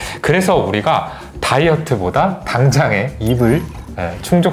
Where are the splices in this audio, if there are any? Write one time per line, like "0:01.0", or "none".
none